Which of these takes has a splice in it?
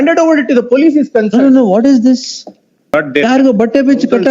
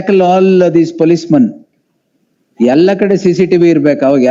first; 1 cut; at 2.9 s

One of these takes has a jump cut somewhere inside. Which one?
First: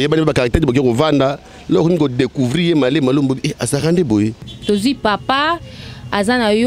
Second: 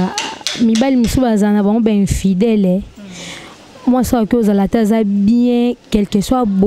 first; 1 cut; at 4.5 s

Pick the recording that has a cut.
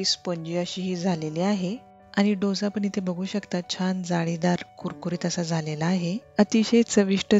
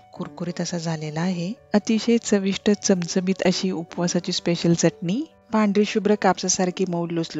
second; 1 cut; at 5.4 s

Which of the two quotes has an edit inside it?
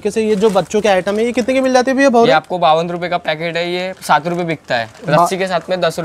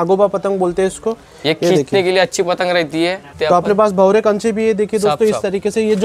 second; 1 cut; at 3.3 s

